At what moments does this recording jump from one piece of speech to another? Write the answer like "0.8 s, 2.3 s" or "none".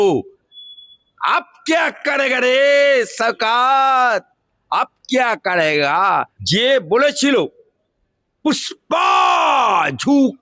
6.3 s